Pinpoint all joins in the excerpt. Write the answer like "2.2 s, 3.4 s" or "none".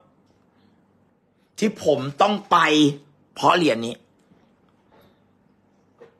1.1 s

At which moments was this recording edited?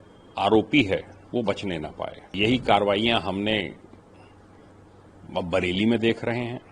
2.3 s

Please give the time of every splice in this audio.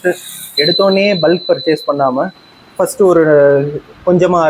none

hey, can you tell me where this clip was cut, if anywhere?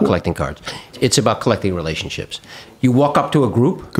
0.9 s, 2.7 s

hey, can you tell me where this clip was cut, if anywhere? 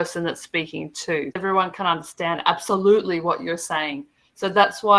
1.4 s

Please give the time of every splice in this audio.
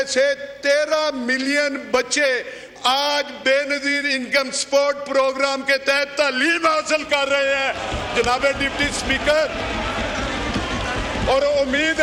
none

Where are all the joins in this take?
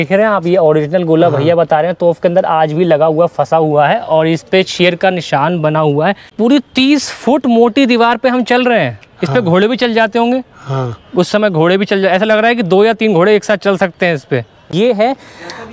6.3 s, 14.7 s

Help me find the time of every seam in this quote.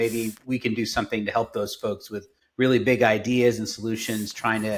none

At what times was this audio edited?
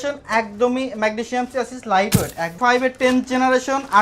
2.6 s

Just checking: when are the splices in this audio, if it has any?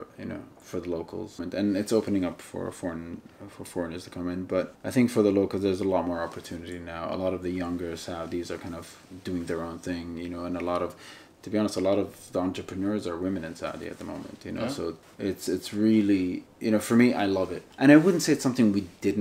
1.4 s, 4.8 s, 15.0 s, 16.5 s, 17.6 s

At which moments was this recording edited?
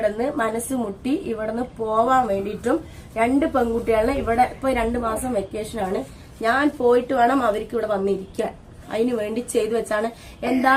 none

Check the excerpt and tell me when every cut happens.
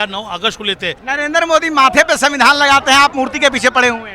1.0 s

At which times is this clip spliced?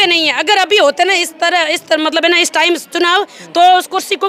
none

